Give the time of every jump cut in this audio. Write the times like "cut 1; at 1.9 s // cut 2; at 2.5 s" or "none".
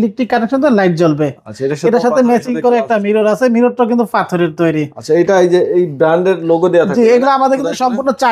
none